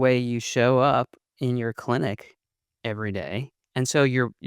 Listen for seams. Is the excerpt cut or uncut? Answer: cut